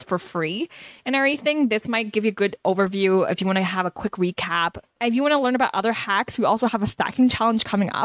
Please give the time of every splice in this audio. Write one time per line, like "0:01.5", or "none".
0:04.8

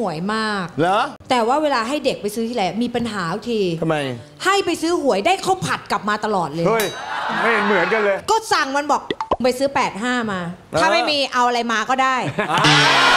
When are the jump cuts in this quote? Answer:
0:01.2
0:08.2

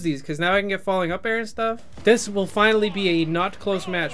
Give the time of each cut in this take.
0:01.9

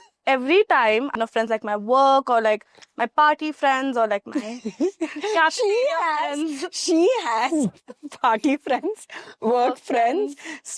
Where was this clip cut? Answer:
0:01.1

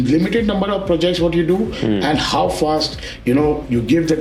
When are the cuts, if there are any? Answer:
none

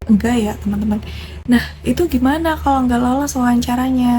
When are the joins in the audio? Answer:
0:01.3

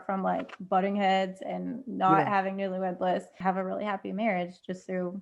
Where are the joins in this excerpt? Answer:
0:03.3

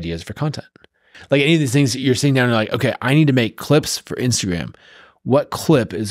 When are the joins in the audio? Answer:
0:01.1

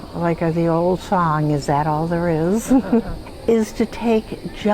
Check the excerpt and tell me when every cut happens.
0:03.2

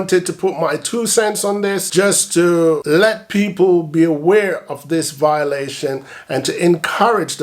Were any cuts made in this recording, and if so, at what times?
0:01.8
0:02.8

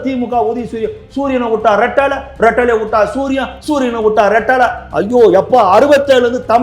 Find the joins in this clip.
none

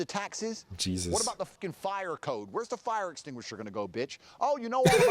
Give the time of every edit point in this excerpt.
0:01.5

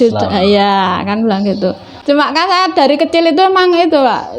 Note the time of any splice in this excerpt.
0:01.9

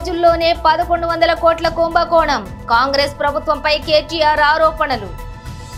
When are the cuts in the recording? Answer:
none

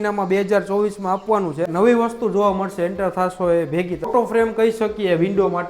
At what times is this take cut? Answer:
0:01.7
0:04.1

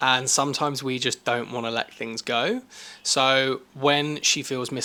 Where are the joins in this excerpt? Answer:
none

